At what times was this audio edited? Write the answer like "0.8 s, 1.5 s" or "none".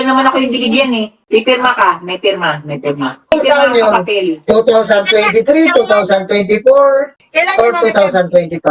1.1 s